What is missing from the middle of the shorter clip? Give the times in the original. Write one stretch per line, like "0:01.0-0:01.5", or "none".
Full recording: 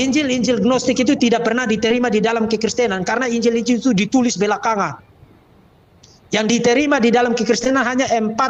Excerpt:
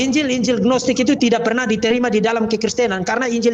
none